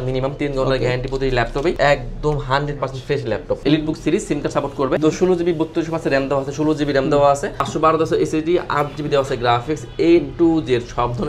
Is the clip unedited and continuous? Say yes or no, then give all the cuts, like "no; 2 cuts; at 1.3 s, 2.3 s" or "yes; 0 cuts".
no; 4 cuts; at 1.8 s, 3.6 s, 5.0 s, 7.6 s